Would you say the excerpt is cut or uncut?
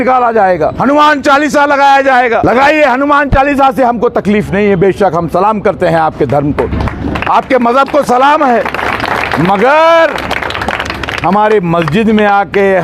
cut